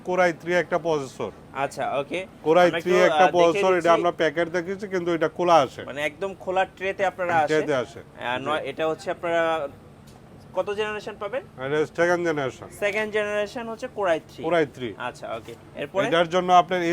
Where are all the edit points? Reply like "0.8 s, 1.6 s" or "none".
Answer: none